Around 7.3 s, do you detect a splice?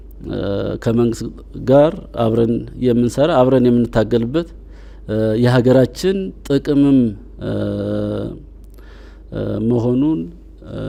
no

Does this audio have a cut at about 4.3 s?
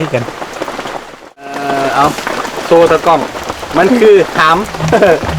no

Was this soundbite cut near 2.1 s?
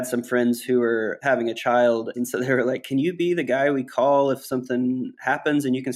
yes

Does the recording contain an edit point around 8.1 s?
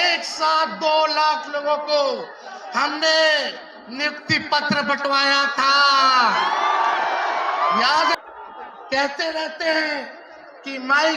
yes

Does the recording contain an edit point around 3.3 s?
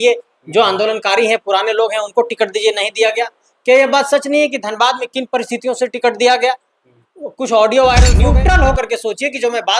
no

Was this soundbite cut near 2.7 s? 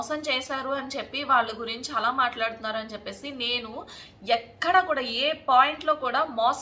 no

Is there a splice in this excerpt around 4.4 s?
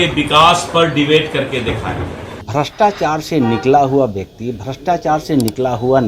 no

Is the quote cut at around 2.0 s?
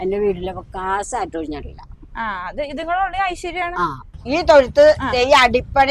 no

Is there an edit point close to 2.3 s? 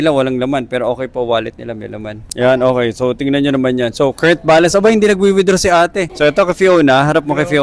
no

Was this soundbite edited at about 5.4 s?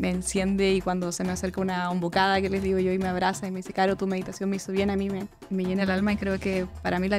yes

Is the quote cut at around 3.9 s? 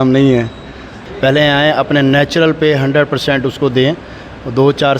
no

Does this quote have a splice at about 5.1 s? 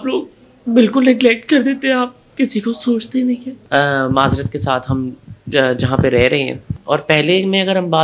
no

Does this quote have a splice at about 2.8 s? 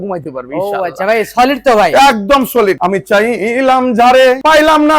yes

